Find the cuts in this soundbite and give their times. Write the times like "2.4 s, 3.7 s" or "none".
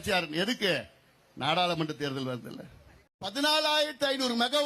3.2 s